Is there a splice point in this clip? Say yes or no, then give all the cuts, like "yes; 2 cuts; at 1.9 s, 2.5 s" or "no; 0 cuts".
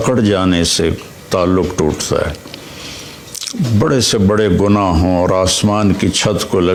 no; 0 cuts